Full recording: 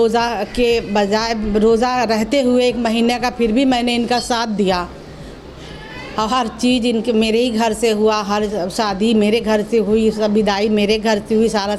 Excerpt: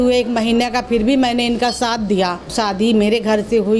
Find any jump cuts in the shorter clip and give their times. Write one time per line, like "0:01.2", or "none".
0:02.5